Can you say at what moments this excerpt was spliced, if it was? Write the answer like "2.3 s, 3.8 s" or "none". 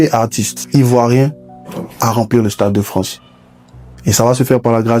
none